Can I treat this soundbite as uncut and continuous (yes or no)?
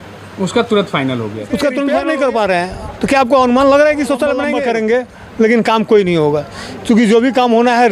no